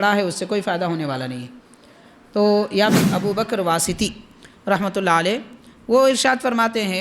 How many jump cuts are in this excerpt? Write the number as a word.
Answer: one